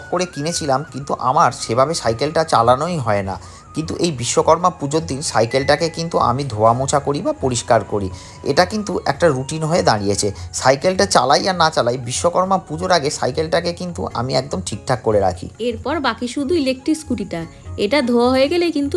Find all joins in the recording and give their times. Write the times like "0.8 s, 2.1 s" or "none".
none

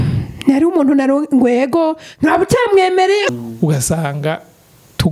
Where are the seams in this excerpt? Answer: 3.3 s

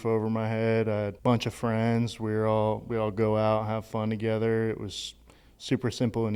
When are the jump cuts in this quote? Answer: 1.1 s

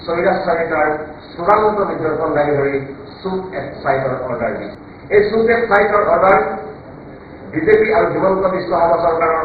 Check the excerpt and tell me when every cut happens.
none

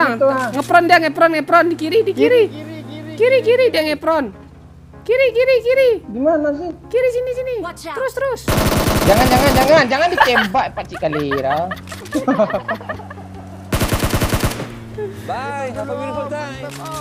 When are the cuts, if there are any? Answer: none

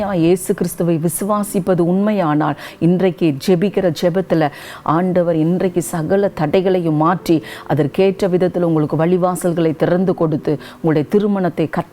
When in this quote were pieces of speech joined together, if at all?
4.6 s

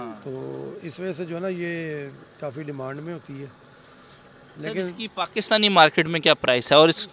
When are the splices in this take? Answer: none

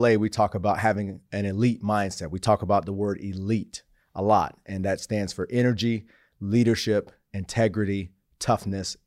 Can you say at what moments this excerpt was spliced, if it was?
none

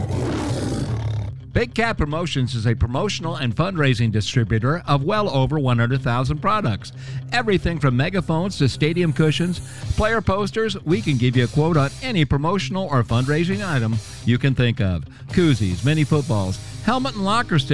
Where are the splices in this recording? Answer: 0.9 s

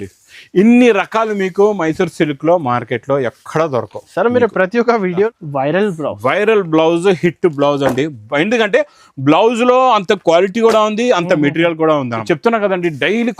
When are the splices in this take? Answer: 5.3 s, 12.2 s

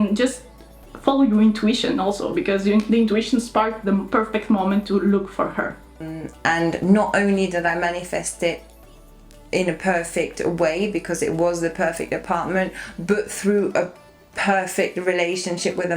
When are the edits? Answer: 6.0 s

